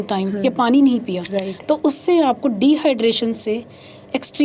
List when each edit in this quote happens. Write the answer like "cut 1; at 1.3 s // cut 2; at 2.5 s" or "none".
none